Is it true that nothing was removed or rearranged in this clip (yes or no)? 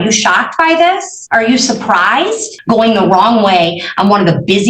no